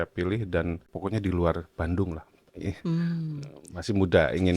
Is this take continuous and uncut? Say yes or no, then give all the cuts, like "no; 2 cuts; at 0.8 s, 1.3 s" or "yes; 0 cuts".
no; 1 cut; at 0.9 s